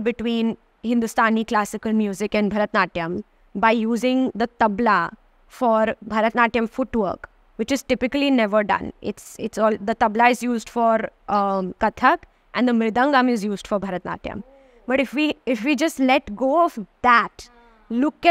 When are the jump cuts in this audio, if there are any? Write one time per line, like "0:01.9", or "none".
none